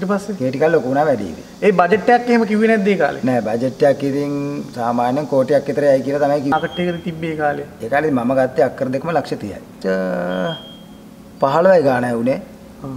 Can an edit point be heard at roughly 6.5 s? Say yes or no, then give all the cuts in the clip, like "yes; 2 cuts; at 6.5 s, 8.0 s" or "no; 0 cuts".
yes; 2 cuts; at 6.5 s, 9.7 s